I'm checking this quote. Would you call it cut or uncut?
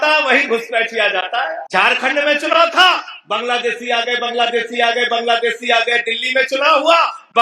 cut